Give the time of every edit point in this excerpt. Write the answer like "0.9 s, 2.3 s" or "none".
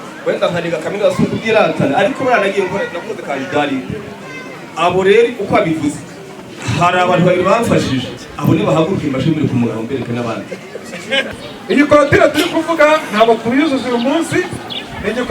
11.3 s